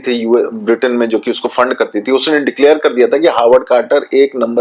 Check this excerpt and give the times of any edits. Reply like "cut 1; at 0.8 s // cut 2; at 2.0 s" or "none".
none